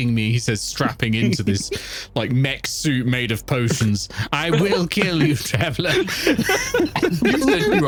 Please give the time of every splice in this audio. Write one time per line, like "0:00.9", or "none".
none

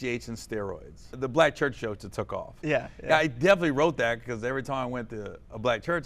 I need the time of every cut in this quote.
0:01.1

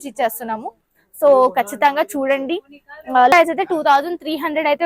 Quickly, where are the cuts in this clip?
0:03.3

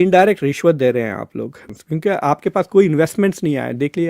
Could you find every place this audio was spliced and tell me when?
0:01.7

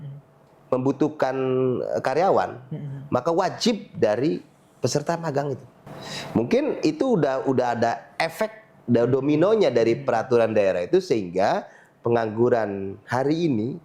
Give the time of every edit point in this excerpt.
0:05.7

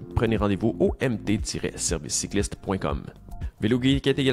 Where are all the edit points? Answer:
0:03.4

